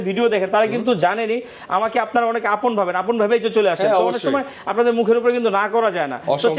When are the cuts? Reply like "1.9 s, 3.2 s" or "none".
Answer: none